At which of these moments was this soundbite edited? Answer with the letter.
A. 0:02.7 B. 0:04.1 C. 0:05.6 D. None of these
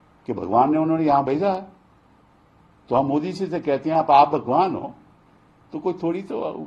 D